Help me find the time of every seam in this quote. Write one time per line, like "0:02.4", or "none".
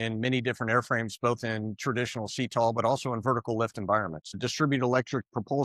0:04.4